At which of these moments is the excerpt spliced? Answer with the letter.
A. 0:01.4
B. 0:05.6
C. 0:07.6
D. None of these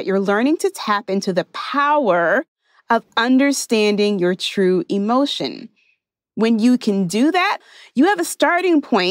C